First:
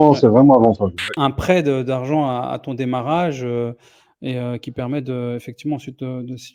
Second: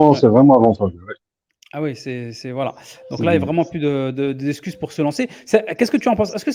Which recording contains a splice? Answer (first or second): first